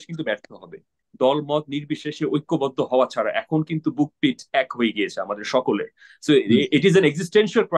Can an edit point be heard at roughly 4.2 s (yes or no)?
no